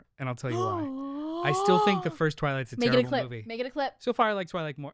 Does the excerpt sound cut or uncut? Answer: uncut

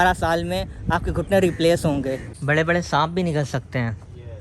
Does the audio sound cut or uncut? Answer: cut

